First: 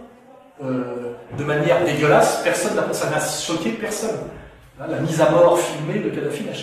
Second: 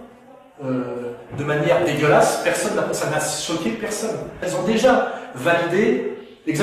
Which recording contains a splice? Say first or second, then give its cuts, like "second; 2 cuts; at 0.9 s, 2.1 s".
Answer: second; 1 cut; at 4.4 s